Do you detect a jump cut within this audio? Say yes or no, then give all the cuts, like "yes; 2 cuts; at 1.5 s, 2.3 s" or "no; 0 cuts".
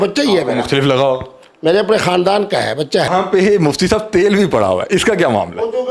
yes; 1 cut; at 3.1 s